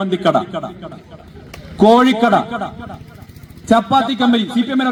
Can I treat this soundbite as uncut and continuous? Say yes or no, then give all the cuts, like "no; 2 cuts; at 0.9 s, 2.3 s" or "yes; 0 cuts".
yes; 0 cuts